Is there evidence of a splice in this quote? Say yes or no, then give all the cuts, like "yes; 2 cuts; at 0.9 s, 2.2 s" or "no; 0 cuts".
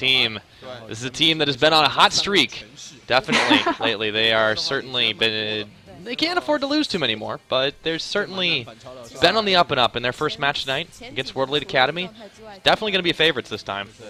no; 0 cuts